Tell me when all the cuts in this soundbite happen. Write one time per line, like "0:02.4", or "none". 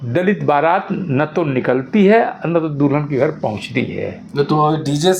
none